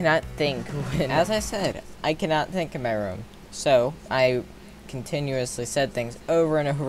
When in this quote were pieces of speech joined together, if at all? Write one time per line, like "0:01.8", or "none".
0:01.1